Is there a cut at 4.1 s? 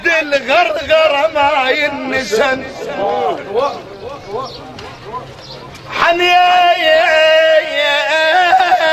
yes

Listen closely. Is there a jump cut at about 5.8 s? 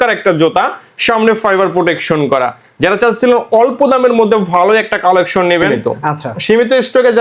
yes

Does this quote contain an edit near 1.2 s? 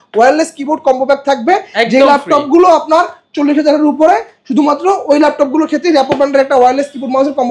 no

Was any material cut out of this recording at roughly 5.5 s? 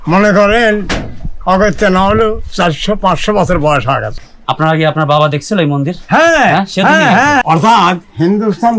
no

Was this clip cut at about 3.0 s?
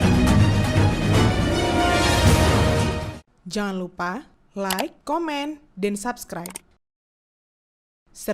yes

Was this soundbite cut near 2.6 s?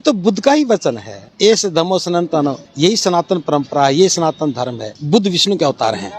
no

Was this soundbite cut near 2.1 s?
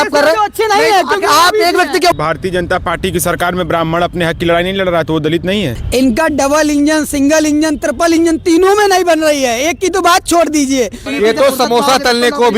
yes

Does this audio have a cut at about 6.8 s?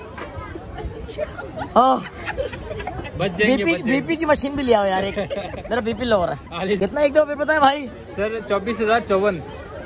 yes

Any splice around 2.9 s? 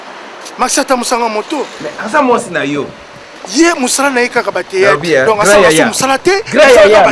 no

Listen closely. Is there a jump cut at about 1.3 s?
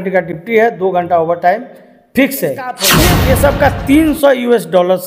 no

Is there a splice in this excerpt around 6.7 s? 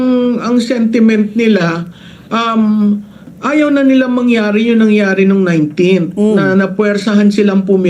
yes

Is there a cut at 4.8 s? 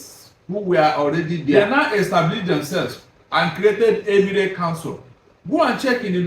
no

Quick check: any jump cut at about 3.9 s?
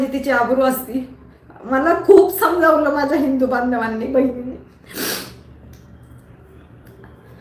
no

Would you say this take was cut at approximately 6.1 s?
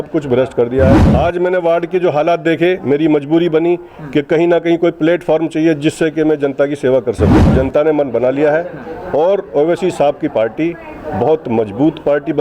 no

